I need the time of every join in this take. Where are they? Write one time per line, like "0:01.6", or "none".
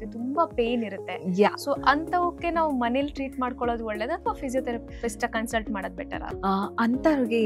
0:06.2

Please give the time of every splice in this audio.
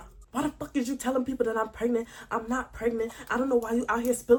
none

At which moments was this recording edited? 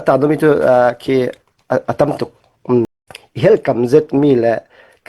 0:03.1

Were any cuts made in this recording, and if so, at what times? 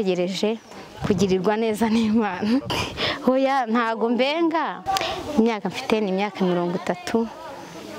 0:04.8

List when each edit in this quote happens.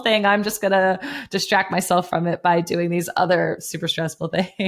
none

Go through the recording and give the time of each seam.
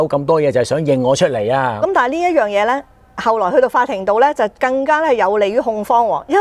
0:01.8

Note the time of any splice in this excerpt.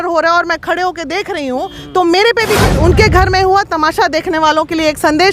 0:02.7

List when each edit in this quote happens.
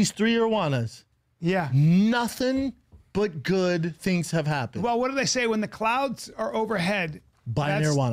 none

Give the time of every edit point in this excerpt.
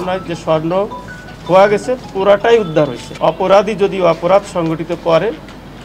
0:03.0

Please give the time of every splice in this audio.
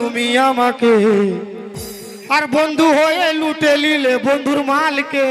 none

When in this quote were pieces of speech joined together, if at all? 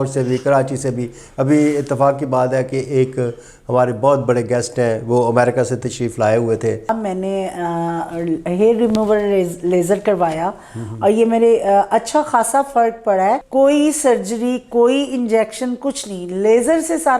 0:06.9
0:13.4

